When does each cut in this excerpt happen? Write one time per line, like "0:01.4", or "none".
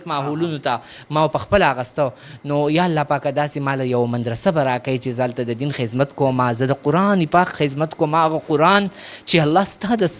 none